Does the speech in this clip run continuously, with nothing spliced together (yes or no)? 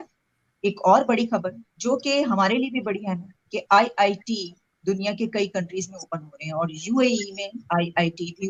yes